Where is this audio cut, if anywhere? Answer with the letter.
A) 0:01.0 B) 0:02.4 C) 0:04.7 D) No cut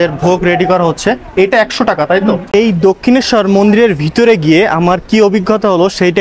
B